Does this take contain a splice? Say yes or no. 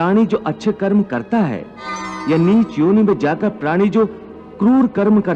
yes